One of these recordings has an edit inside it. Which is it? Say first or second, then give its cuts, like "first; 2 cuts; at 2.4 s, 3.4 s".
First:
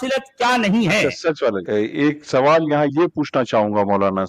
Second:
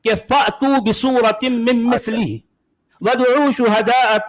first; 1 cut; at 1.6 s